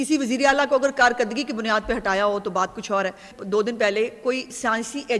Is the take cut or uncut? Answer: cut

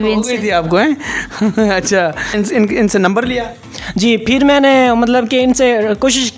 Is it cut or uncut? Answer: uncut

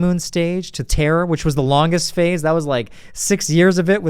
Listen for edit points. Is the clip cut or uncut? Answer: uncut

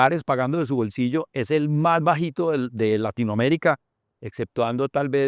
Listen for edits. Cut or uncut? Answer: uncut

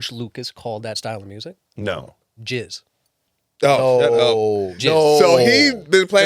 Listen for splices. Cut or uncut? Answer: cut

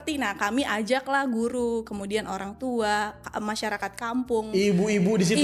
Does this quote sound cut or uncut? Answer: uncut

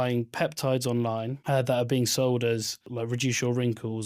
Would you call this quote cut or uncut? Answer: cut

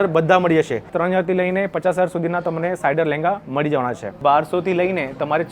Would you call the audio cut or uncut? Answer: cut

